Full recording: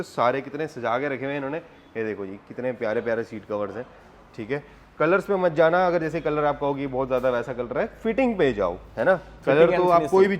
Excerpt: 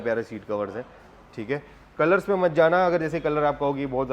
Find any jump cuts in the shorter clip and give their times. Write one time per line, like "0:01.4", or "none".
none